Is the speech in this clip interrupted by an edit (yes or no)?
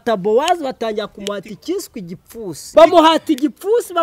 yes